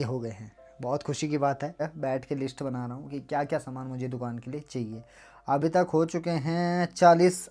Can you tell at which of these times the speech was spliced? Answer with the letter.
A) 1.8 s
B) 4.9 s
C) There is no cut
A